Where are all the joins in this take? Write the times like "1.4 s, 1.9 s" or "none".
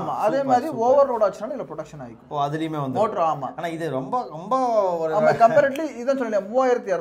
none